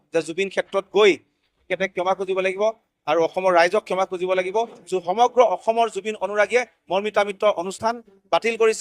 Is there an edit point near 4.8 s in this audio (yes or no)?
yes